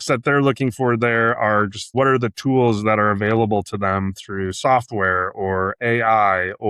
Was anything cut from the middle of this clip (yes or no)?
yes